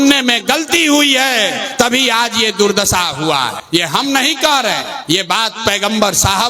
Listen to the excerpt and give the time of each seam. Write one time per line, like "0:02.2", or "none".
0:01.6
0:03.6
0:04.9